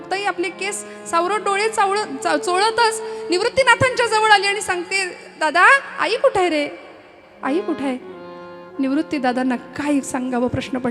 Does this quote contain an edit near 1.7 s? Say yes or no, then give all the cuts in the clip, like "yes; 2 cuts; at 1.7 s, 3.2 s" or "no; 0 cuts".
no; 0 cuts